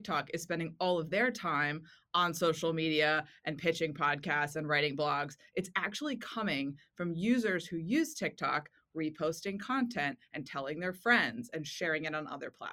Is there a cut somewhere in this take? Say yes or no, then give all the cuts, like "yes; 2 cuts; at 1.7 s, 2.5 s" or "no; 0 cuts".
no; 0 cuts